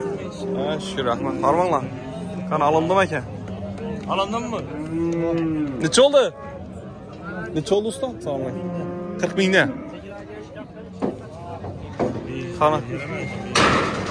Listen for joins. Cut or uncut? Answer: uncut